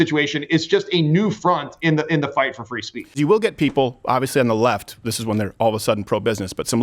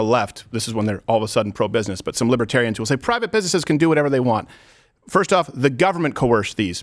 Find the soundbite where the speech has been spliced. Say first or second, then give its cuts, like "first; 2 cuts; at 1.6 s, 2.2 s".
first; 1 cut; at 3.2 s